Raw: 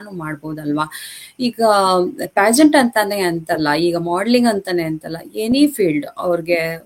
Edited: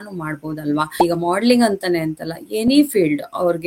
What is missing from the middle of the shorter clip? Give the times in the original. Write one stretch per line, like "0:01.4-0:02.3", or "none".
0:01.0-0:03.8